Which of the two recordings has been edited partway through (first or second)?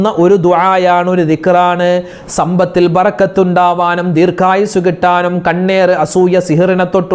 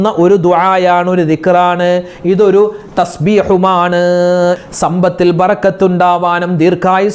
first